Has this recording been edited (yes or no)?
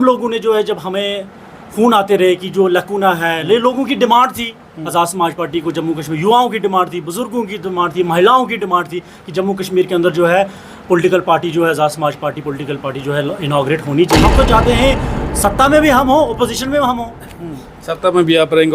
yes